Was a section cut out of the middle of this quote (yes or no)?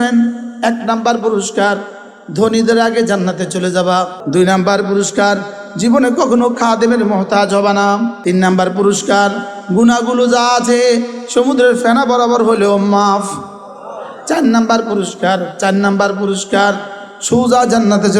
yes